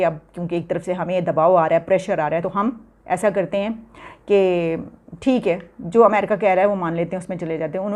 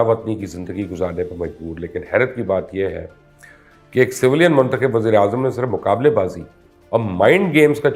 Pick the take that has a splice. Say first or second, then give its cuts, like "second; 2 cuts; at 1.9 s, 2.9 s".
first; 1 cut; at 2.4 s